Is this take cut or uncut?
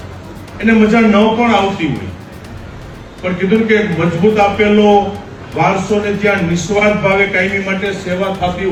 uncut